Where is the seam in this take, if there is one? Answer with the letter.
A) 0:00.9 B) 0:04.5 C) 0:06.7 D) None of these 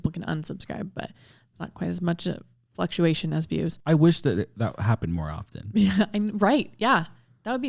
D